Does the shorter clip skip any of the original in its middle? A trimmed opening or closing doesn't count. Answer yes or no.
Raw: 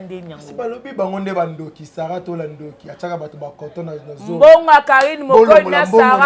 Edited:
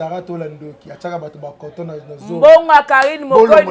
no